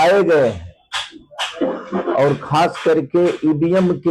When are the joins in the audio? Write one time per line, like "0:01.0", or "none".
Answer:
none